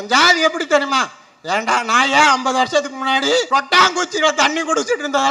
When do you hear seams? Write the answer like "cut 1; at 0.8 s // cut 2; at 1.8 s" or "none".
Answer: cut 1; at 3.5 s